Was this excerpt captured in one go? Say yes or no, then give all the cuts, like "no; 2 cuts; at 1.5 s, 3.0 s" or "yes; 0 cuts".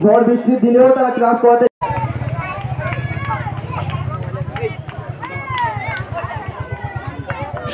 no; 1 cut; at 1.8 s